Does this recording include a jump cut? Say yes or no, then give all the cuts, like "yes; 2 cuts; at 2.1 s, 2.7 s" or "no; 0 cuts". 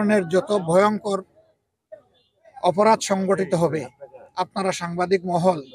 no; 0 cuts